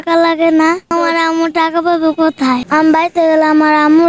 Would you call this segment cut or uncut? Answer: cut